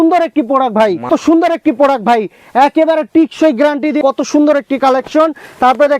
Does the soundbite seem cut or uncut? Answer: cut